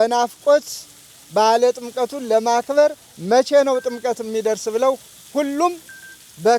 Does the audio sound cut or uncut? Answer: uncut